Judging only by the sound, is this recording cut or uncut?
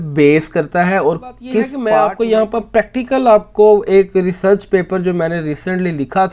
cut